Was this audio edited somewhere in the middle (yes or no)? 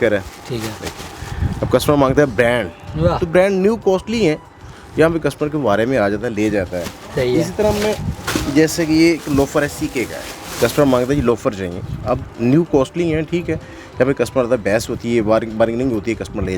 no